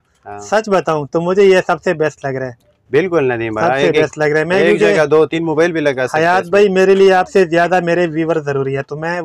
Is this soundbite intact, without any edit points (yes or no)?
yes